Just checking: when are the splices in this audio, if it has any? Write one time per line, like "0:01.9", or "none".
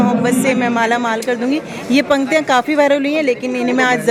none